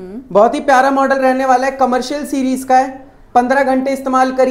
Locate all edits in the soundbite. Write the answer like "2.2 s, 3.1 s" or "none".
none